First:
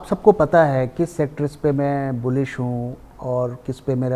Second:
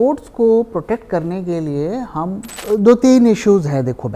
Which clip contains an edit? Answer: second; 1 cut; at 2.5 s

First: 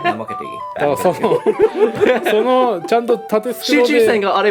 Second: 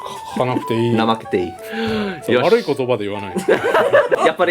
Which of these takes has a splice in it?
second; 1 cut; at 1.6 s

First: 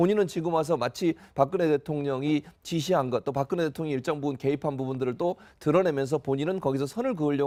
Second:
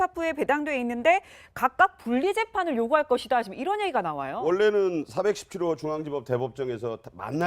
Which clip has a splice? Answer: second; 1 cut; at 4.1 s

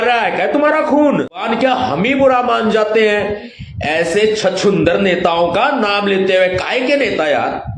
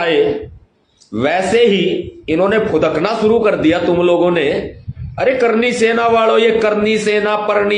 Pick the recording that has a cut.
first; 1 cut; at 1.4 s

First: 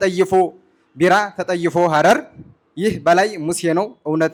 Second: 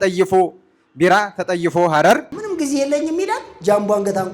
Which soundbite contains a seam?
second; 1 cut; at 2.4 s

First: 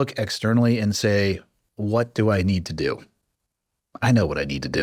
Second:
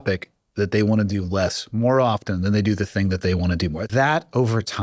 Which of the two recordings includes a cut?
second; 1 cut; at 3.9 s

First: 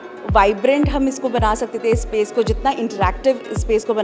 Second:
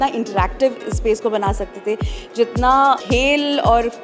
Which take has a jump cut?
second; 1 cut; at 3.0 s

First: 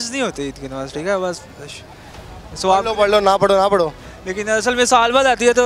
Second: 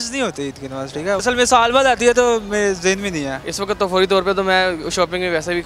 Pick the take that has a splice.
second; 2 cuts; at 1.2 s, 3.4 s

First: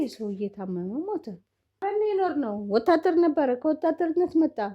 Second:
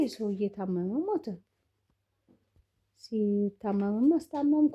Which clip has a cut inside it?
first; 1 cut; at 1.8 s

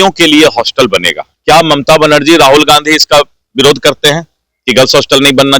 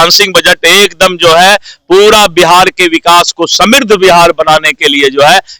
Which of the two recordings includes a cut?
first; 1 cut; at 1.3 s

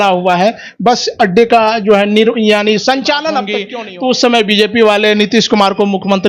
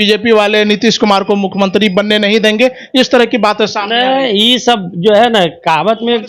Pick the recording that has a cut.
first; 1 cut; at 3.6 s

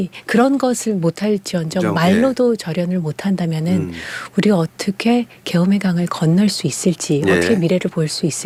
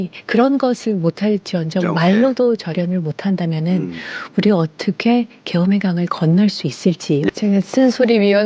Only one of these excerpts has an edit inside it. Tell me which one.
second; 1 cut; at 7.3 s

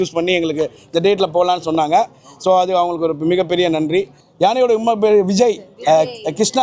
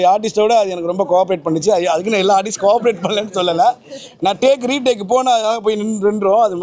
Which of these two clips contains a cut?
first; 1 cut; at 4.2 s

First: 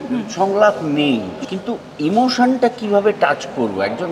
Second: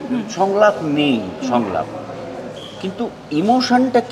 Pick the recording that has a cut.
first; 1 cut; at 1.3 s

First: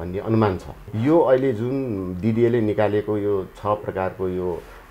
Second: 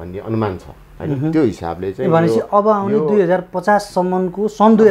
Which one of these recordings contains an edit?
first; 1 cut; at 0.9 s

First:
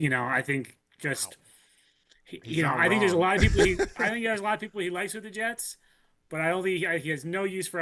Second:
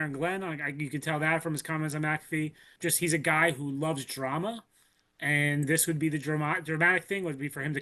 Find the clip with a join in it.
second; 1 cut; at 2.7 s

